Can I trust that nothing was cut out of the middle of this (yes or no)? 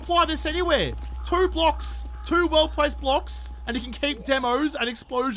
yes